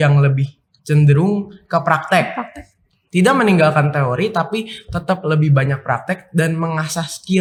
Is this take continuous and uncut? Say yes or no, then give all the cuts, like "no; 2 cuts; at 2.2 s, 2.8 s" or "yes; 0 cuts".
yes; 0 cuts